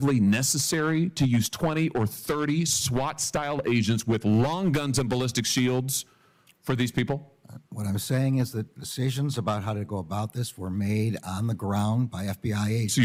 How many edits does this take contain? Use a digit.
0